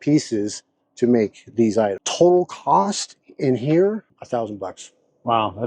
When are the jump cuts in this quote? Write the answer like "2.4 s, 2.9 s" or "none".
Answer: 2.0 s, 4.1 s